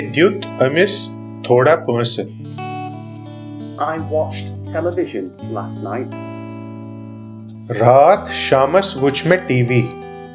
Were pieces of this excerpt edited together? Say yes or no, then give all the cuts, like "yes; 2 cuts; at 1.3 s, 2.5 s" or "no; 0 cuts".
no; 0 cuts